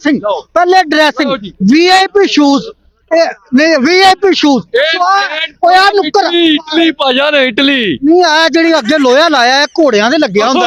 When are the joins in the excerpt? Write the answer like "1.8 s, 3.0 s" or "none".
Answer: none